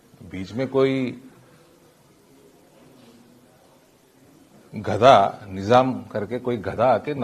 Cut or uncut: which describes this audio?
uncut